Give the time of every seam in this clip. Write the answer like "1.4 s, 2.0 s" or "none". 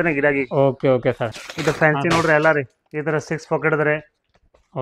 1.3 s